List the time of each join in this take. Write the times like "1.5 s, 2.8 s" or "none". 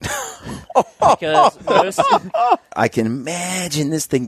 2.7 s